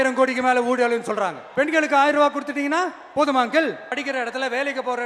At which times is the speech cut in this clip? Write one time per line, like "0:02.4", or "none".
0:01.4
0:03.9